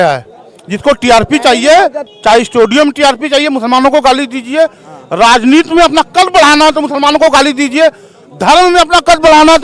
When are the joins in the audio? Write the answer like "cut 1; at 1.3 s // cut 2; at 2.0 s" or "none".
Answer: cut 1; at 2.1 s